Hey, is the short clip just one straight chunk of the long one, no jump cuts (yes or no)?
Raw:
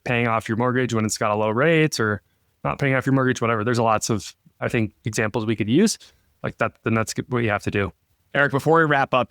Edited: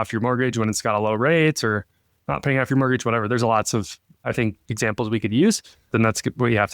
no